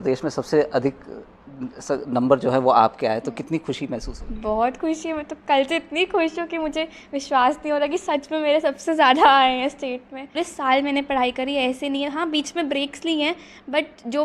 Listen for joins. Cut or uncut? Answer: cut